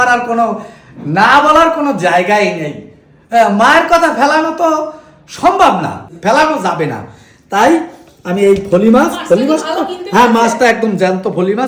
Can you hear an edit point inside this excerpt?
yes; 1 cut; at 6.1 s

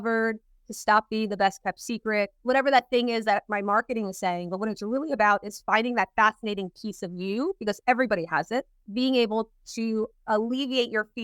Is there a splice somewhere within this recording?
yes; 2 cuts; at 2.4 s, 8.8 s

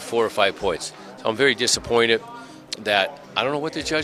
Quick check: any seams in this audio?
no; 0 cuts

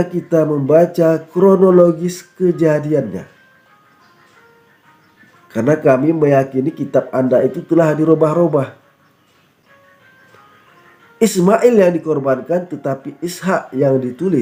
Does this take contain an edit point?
no; 0 cuts

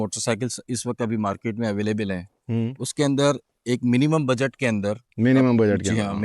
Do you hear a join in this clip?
no; 0 cuts

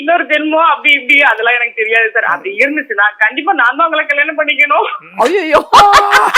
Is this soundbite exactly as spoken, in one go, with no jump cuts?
yes; 0 cuts

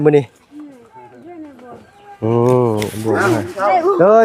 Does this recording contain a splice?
no; 0 cuts

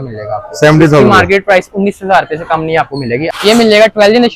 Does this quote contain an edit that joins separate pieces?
yes; 1 cut; at 3.2 s

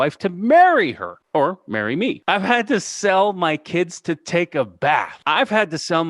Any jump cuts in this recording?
yes; 3 cuts; at 1.1 s, 2.2 s, 5.2 s

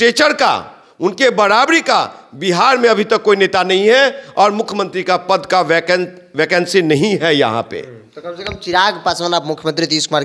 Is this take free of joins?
yes; 0 cuts

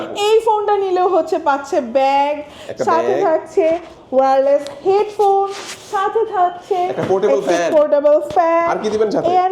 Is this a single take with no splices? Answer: yes; 0 cuts

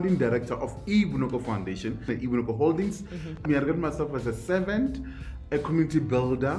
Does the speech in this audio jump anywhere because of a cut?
yes; 3 cuts; at 2.1 s, 3.4 s, 5.3 s

